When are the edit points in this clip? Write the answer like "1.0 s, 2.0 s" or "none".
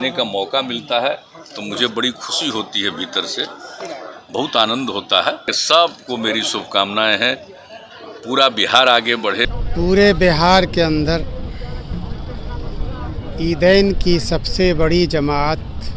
5.6 s, 9.5 s